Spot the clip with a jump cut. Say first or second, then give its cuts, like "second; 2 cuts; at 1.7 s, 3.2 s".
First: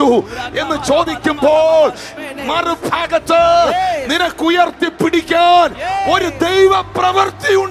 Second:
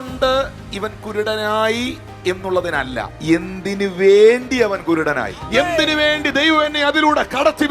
second; 2 cuts; at 3.1 s, 5.4 s